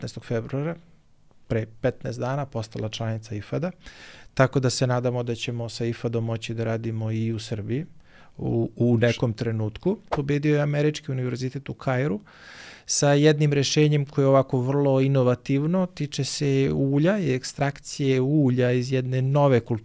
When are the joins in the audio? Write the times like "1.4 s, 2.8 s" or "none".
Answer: 10.1 s